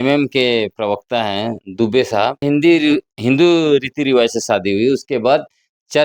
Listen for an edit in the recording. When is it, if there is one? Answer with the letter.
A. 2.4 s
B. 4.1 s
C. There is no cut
A